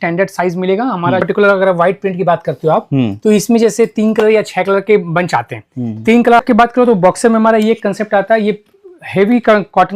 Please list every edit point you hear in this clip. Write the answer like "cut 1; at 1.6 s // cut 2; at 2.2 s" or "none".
cut 1; at 1.2 s // cut 2; at 6.4 s